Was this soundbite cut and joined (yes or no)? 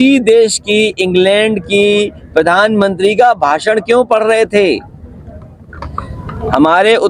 no